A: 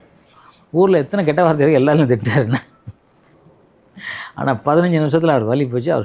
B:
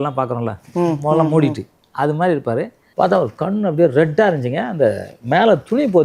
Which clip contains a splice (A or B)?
B